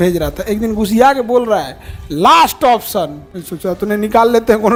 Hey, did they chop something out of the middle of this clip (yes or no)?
no